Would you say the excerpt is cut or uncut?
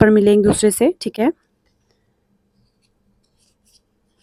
uncut